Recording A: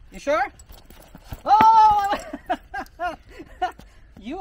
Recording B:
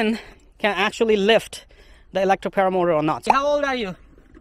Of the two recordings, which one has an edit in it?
B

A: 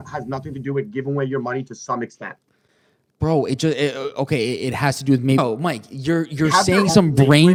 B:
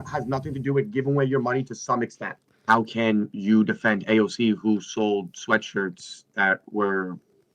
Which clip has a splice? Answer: B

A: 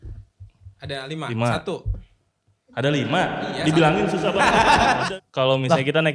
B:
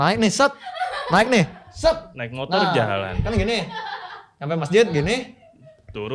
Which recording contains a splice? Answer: A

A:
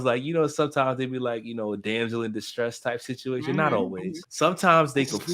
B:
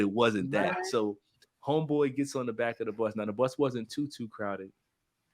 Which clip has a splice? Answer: A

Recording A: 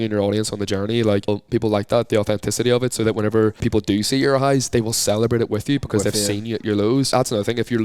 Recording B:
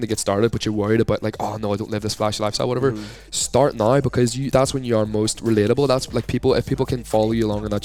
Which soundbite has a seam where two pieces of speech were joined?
A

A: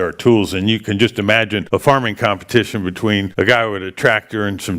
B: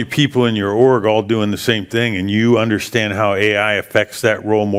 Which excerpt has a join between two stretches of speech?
A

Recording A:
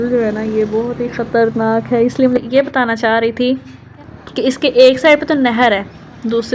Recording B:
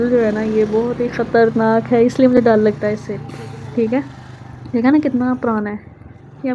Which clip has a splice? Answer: A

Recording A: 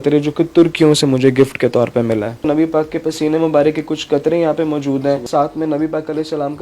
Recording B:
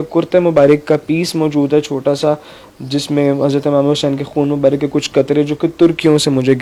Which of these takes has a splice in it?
A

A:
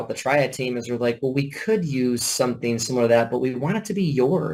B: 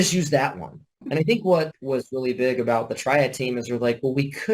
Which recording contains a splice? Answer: B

